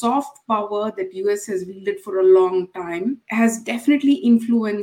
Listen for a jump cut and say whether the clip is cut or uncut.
cut